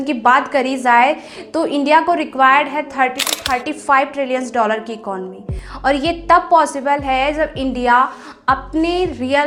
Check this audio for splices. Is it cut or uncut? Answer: uncut